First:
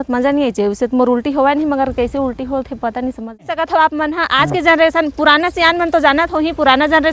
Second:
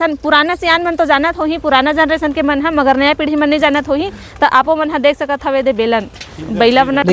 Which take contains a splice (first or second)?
first